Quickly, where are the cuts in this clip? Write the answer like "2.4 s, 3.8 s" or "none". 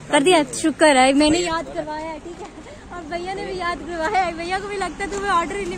none